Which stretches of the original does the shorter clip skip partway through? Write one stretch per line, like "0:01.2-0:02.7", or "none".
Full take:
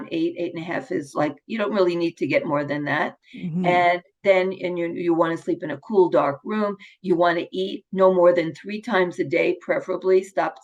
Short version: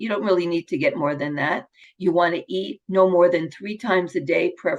0:03.3-0:06.9